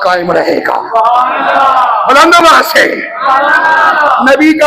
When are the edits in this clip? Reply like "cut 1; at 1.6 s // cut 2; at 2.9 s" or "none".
none